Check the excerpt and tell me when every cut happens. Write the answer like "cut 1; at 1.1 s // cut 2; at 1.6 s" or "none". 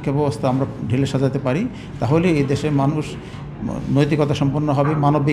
none